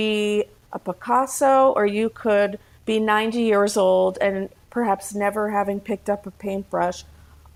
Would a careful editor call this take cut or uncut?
uncut